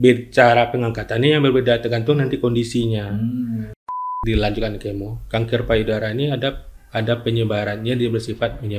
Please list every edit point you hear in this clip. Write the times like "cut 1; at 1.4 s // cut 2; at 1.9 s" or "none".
cut 1; at 3.9 s